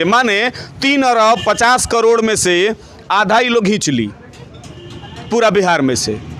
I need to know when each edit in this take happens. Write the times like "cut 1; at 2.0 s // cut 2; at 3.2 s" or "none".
none